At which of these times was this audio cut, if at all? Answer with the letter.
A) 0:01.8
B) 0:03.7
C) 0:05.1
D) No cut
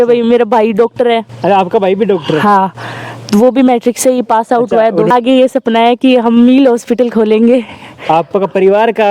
C